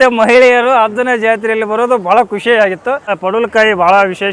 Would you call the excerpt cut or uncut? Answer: cut